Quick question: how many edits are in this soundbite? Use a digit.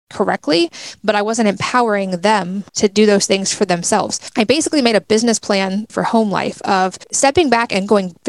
4